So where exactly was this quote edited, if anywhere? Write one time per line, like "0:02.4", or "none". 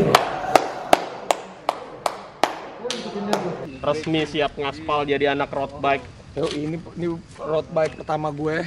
0:03.7